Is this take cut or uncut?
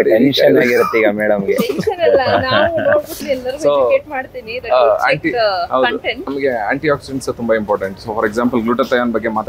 uncut